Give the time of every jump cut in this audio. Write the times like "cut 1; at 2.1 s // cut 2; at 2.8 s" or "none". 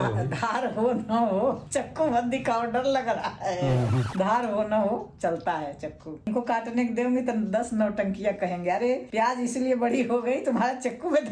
cut 1; at 6.3 s